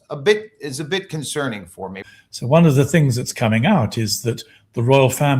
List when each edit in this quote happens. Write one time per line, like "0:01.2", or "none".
0:01.9